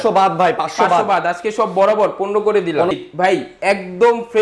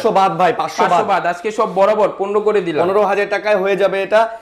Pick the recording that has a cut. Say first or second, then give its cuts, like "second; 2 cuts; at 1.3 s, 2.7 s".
first; 1 cut; at 2.9 s